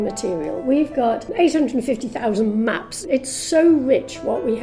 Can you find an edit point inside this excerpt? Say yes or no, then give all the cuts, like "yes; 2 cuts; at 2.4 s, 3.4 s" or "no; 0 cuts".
yes; 1 cut; at 3.0 s